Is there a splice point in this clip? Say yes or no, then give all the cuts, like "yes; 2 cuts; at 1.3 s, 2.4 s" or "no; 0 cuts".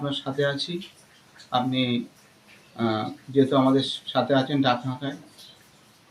no; 0 cuts